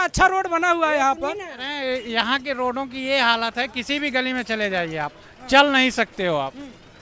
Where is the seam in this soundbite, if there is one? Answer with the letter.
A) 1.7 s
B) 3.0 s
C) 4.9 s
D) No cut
A